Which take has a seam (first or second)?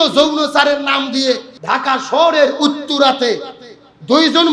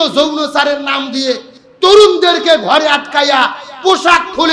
first